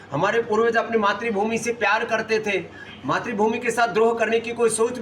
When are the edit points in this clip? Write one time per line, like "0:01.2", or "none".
none